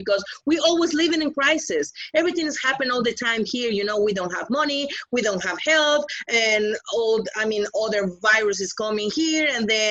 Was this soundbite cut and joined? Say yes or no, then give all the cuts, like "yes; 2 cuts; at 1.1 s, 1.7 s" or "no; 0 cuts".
no; 0 cuts